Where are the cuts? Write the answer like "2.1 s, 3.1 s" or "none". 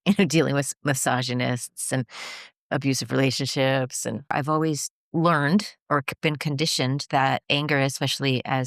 4.3 s, 7.5 s